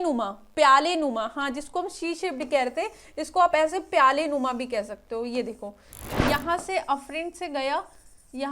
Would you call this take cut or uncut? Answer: cut